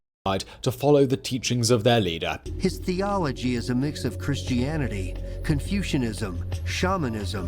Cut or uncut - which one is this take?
cut